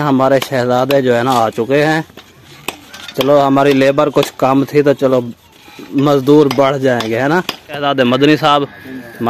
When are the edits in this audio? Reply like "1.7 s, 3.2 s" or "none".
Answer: 7.8 s